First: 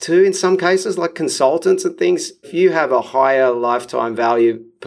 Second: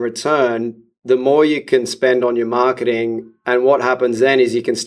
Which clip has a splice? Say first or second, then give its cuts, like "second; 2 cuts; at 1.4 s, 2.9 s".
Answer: first; 1 cut; at 2.5 s